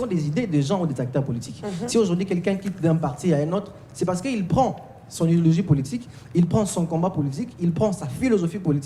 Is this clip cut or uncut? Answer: uncut